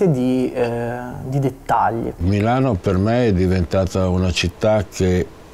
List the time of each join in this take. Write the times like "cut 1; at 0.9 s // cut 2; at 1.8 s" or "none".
cut 1; at 2.2 s